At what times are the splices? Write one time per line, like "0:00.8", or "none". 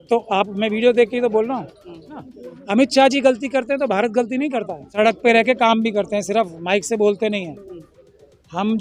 0:02.2
0:04.9

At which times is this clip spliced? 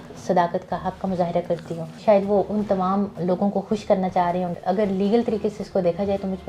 0:02.0
0:04.5

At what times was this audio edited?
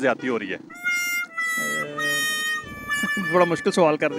none

